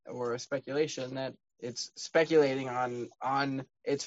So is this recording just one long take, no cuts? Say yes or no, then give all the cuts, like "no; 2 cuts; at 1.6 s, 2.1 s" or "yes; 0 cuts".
no; 1 cut; at 1.4 s